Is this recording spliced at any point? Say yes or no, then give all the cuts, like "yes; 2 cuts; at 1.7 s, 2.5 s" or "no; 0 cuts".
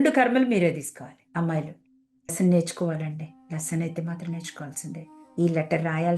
yes; 1 cut; at 2.3 s